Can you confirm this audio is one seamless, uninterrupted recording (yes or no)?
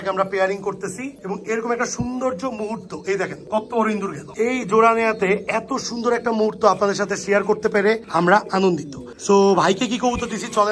yes